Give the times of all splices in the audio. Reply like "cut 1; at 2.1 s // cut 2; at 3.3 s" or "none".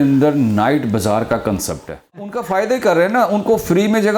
cut 1; at 2.4 s